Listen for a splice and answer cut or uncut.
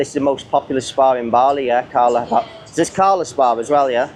uncut